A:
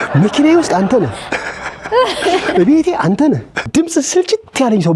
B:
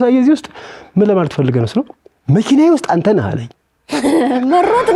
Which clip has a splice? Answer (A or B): A